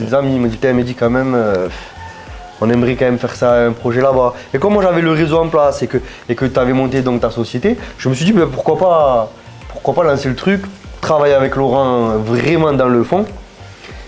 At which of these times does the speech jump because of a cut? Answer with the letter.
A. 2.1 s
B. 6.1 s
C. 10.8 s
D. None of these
D